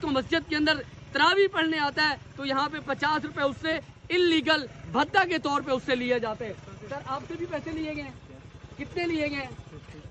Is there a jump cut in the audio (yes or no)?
no